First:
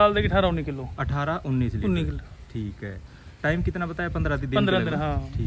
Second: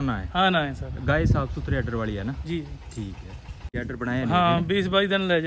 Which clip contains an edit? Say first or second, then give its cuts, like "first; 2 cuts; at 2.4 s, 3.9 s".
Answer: second; 1 cut; at 3.8 s